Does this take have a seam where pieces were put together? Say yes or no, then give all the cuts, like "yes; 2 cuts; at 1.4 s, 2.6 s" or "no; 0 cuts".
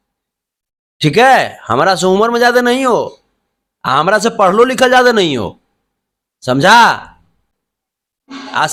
no; 0 cuts